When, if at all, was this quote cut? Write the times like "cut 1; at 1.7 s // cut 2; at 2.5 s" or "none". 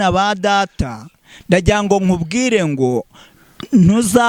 none